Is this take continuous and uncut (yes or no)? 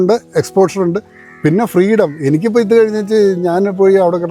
yes